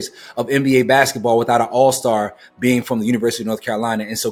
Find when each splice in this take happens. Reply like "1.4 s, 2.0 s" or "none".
none